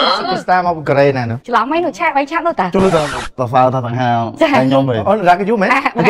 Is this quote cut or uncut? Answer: uncut